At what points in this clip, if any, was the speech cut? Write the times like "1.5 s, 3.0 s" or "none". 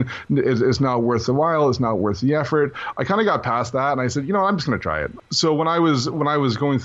2.8 s, 5.2 s